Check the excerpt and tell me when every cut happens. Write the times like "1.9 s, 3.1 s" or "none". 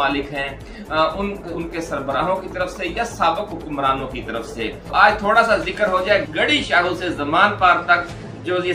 4.9 s